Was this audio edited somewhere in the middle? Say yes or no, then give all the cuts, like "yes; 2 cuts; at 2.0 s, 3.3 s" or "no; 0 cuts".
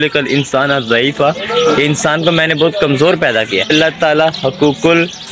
yes; 1 cut; at 3.9 s